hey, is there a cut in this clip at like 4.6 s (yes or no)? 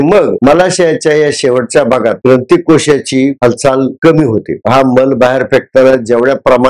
yes